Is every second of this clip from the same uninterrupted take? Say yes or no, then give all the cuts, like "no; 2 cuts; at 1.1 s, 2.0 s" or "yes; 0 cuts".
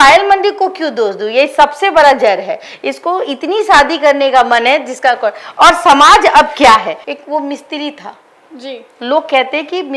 yes; 0 cuts